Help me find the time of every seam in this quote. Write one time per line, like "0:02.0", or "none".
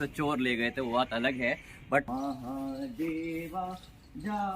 0:02.1